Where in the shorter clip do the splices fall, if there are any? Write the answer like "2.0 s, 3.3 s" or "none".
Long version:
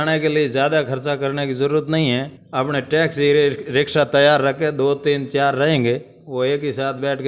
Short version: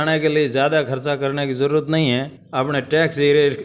none